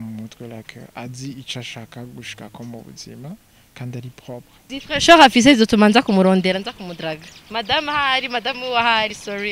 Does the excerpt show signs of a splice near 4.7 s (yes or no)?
yes